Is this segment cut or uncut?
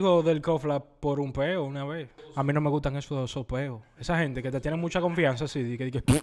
cut